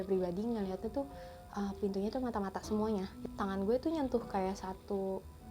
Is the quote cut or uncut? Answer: cut